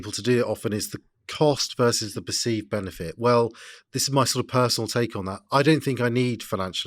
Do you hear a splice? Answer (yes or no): no